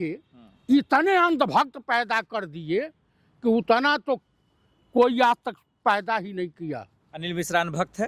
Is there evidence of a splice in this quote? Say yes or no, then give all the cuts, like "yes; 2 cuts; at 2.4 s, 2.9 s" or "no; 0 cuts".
no; 0 cuts